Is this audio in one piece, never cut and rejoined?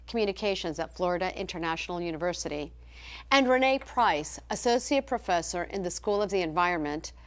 no; 1 cut; at 4.3 s

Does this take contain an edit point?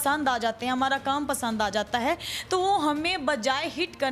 no; 0 cuts

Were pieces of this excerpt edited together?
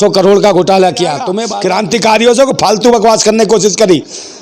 yes; 1 cut; at 1.4 s

